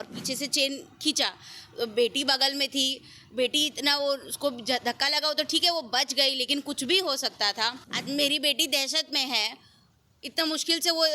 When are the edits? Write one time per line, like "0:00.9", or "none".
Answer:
0:07.9